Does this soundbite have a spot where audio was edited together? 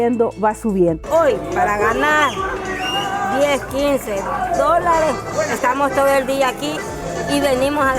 yes; 1 cut; at 0.9 s

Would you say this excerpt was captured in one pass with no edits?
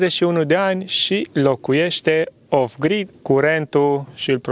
no; 1 cut; at 3.0 s

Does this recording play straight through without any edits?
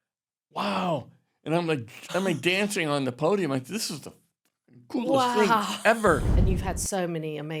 no; 1 cut; at 6.3 s

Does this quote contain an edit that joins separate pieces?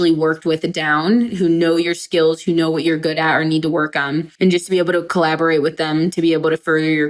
no; 0 cuts

